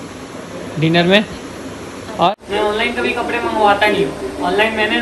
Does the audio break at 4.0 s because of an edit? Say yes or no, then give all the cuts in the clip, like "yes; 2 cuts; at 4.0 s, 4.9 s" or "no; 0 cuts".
no; 1 cut; at 2.3 s